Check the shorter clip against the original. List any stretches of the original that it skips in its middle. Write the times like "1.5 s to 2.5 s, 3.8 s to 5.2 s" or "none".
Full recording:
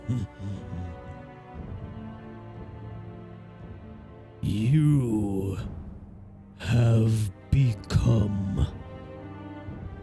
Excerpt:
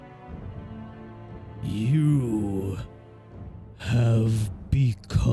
2.9 s to 4.4 s